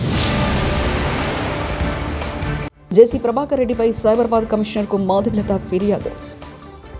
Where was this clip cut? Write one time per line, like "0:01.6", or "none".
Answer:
none